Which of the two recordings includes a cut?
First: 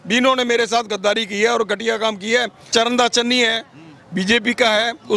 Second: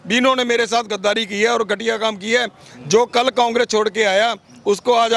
first; 1 cut; at 2.7 s

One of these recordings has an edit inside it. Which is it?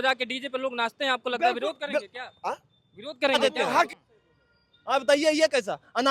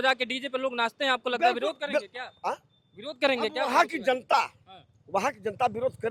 first; 1 cut; at 3.9 s

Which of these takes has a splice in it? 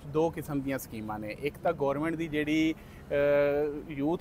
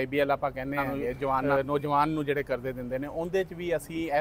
second; 1 cut; at 1.4 s

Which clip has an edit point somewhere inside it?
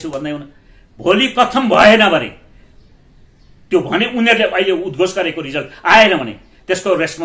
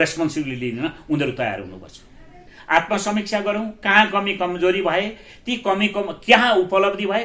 second; 1 cut; at 2.5 s

